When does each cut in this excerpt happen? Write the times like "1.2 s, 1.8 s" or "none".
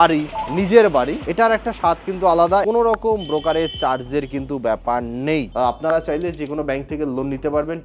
2.6 s, 5.5 s